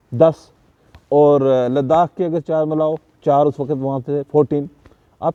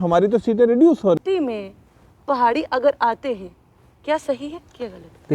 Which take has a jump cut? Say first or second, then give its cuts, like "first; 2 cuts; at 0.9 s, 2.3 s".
second; 1 cut; at 1.2 s